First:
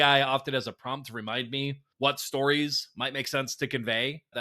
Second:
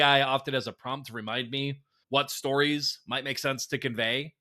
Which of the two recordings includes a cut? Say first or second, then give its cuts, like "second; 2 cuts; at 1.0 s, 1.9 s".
first; 1 cut; at 1.8 s